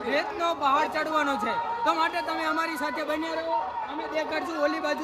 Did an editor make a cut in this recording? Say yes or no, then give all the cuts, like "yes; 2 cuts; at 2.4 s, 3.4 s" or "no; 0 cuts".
no; 0 cuts